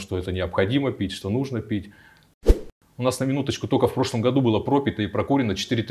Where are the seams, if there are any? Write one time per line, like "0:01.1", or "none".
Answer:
0:02.4